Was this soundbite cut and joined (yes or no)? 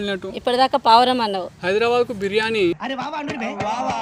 yes